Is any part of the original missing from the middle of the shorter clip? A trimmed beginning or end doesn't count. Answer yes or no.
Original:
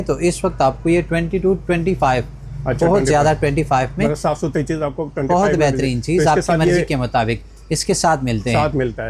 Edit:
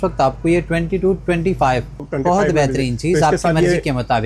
yes